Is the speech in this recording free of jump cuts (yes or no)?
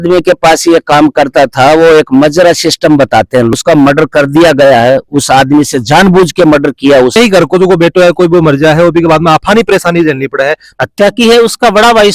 no